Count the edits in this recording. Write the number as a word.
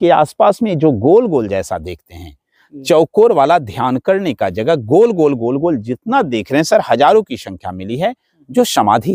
zero